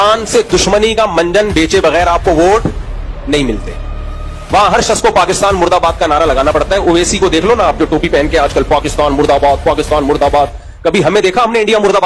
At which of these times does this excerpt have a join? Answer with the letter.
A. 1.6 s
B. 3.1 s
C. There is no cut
C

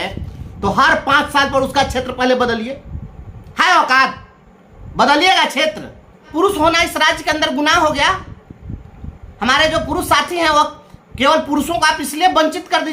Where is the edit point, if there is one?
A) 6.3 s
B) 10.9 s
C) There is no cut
A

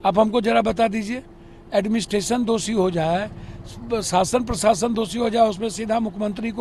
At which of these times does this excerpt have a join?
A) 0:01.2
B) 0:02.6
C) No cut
C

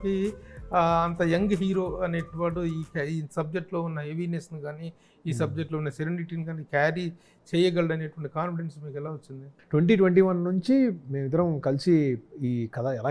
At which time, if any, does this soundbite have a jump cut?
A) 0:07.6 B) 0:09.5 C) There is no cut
B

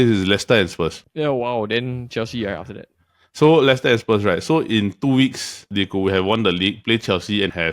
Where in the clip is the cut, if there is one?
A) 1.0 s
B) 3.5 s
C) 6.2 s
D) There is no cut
A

